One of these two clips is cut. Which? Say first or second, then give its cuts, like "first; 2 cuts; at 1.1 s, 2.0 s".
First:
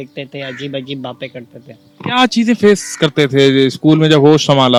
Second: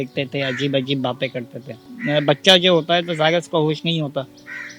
second; 1 cut; at 1.9 s